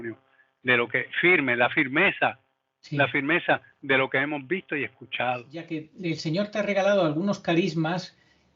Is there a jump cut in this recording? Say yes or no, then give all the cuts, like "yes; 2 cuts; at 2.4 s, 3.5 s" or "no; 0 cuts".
yes; 1 cut; at 5.8 s